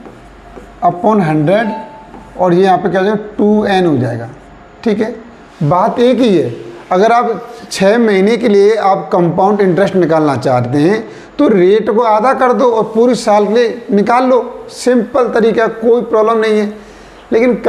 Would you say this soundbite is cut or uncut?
uncut